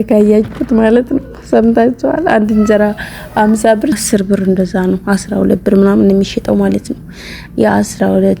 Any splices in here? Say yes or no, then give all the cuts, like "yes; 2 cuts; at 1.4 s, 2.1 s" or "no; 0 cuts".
yes; 1 cut; at 4.0 s